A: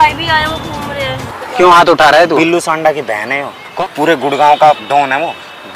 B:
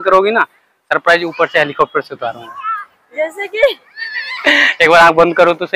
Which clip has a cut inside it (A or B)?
A